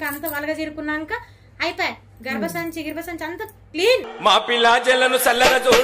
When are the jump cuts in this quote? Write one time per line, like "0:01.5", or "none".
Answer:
none